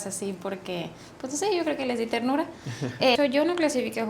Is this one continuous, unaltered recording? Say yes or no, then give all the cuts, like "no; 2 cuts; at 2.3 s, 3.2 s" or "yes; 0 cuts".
no; 1 cut; at 3.2 s